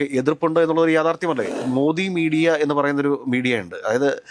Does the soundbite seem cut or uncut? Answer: cut